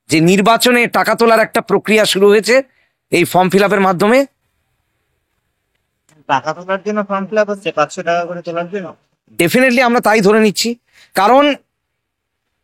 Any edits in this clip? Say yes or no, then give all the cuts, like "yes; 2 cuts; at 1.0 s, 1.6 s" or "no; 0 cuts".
no; 0 cuts